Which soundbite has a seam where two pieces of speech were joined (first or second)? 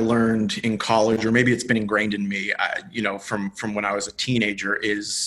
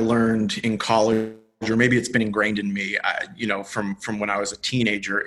first